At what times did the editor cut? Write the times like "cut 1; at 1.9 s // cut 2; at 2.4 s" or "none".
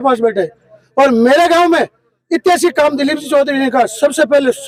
none